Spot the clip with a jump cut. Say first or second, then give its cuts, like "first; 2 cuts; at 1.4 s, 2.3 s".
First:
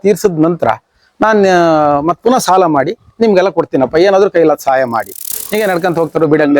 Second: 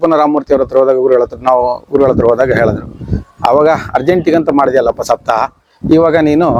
first; 1 cut; at 5.2 s